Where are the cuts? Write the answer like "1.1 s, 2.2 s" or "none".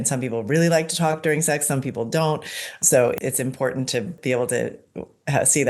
4.2 s